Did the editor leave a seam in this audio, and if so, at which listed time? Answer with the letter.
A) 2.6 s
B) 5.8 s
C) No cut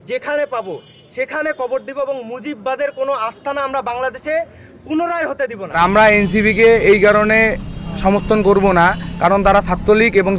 B